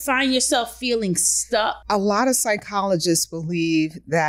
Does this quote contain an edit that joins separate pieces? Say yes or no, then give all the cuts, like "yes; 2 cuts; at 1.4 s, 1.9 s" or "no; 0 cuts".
yes; 1 cut; at 1.8 s